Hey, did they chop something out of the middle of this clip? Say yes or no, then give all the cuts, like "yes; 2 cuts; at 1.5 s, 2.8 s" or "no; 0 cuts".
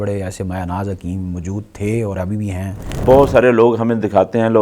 yes; 1 cut; at 3.0 s